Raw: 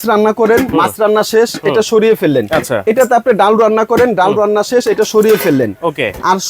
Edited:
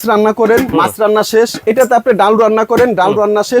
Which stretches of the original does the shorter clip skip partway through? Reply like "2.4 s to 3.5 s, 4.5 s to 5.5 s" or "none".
1.6 s to 2.8 s